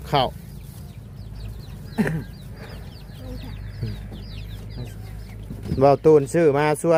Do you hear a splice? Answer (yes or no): no